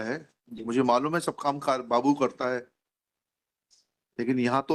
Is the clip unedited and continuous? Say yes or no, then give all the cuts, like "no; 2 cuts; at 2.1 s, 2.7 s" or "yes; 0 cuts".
yes; 0 cuts